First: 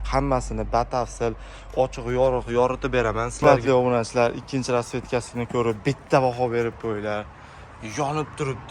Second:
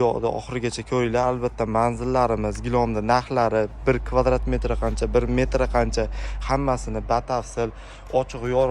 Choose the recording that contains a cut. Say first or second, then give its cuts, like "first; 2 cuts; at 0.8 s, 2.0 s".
first; 1 cut; at 3.3 s